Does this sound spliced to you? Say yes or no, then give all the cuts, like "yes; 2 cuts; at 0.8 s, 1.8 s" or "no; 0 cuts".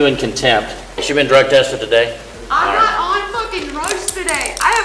yes; 2 cuts; at 0.9 s, 2.3 s